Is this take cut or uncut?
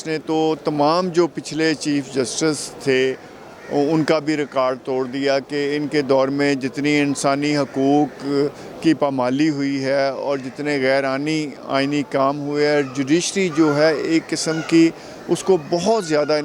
uncut